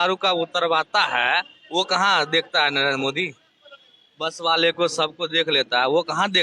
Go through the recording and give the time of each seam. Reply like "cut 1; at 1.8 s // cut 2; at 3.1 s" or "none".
none